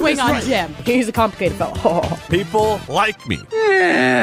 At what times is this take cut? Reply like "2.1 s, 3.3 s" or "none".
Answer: none